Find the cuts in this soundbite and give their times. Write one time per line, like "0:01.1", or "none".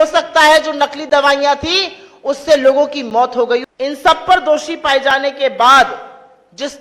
0:03.6

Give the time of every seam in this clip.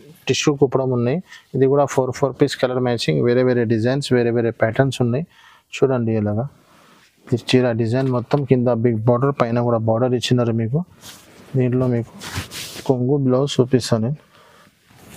none

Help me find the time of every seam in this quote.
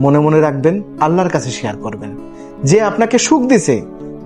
none

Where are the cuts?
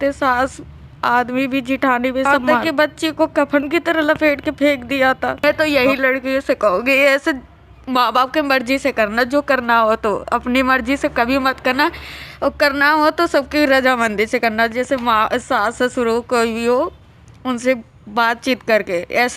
0:02.5
0:05.4

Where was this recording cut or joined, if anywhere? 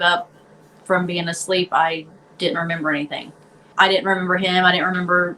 0:03.7

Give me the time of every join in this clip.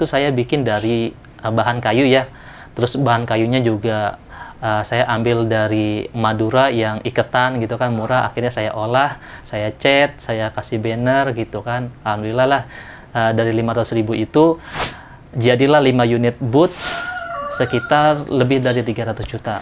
0:16.8

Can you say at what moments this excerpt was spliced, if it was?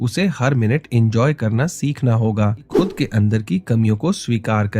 0:02.6

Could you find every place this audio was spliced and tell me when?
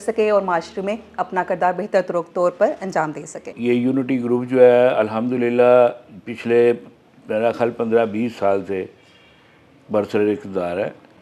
0:03.5

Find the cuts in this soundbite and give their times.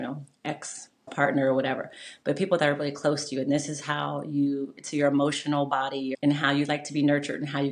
0:01.1
0:06.1

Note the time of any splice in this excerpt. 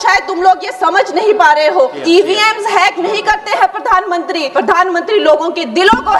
0:02.0
0:04.5

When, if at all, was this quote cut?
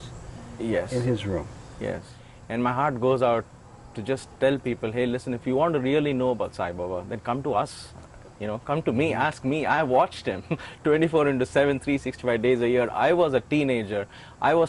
0:02.2

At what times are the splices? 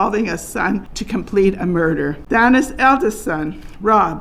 0:00.9
0:02.2

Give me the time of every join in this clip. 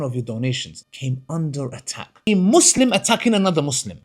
0:02.3

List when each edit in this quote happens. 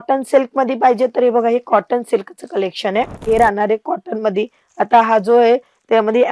0:03.2

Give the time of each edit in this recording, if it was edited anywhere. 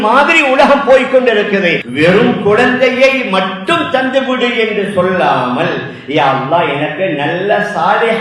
0:01.8

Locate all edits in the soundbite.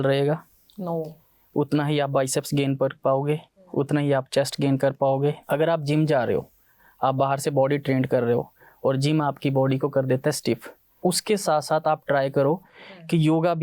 0:05.4
0:11.0

